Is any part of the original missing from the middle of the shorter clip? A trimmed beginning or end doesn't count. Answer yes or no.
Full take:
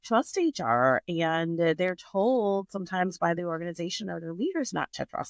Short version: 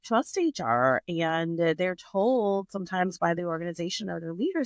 no